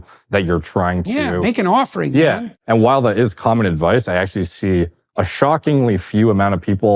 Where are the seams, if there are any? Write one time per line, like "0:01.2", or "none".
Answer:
0:02.4